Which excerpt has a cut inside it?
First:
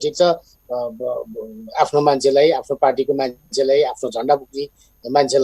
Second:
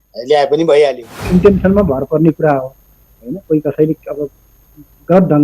second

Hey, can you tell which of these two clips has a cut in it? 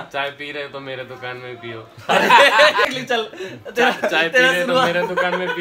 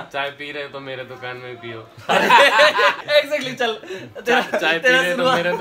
first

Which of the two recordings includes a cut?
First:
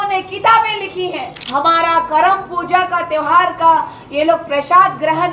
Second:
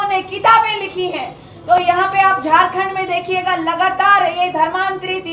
first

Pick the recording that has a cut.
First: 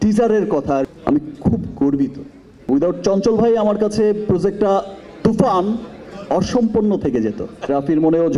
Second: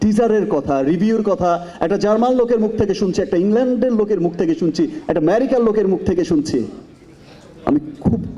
first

